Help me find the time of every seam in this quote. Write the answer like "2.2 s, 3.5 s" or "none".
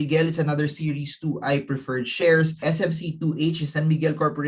2.6 s